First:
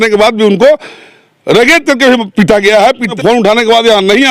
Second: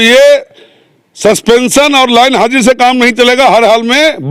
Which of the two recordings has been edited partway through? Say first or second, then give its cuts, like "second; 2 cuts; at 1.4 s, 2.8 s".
first; 1 cut; at 3.1 s